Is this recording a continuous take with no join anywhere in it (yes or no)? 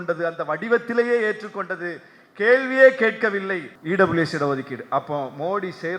no